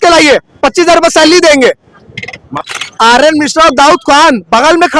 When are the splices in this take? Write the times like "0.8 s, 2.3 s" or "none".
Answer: 2.7 s